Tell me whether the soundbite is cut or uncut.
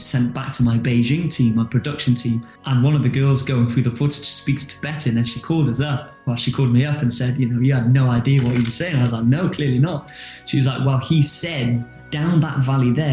cut